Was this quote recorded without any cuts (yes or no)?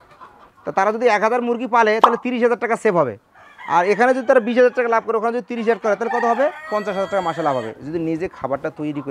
yes